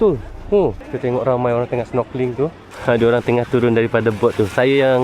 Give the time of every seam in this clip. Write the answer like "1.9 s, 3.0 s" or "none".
0.9 s, 2.6 s